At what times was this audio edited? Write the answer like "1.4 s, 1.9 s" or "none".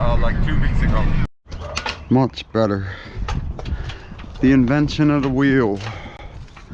1.4 s